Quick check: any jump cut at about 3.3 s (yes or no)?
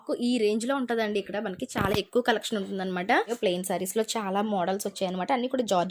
yes